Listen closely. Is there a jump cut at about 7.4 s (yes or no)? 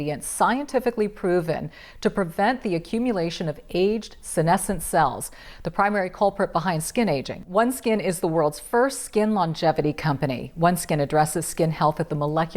yes